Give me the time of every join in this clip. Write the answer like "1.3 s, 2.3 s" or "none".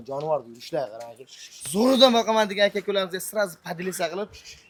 none